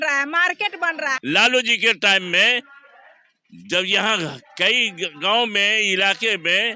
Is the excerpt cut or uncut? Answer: cut